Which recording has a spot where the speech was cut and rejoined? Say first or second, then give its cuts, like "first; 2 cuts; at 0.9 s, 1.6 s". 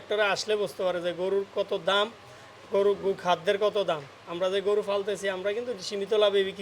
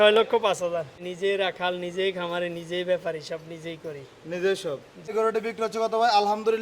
second; 2 cuts; at 1.0 s, 5.1 s